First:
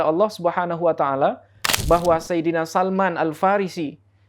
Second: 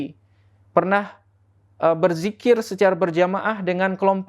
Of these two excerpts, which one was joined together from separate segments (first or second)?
first